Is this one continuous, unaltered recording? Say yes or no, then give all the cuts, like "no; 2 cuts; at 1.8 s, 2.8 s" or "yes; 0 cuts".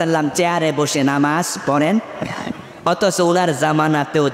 yes; 0 cuts